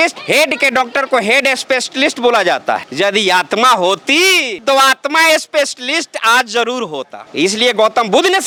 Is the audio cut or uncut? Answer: uncut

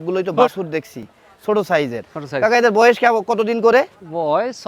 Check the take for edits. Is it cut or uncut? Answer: uncut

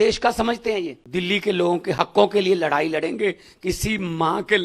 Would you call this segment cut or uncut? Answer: cut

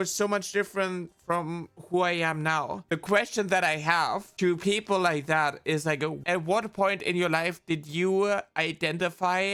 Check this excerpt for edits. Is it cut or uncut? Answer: uncut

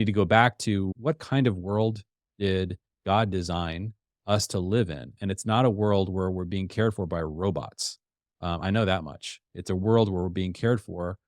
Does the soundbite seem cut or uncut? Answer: cut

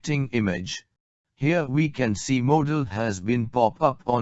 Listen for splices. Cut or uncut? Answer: cut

